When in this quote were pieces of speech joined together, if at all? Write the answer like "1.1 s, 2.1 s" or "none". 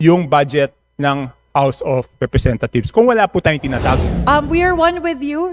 4.1 s